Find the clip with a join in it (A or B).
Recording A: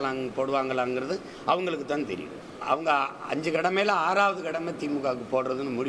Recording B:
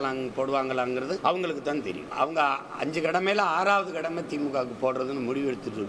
B